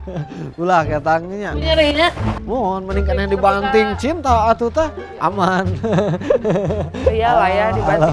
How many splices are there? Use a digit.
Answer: 1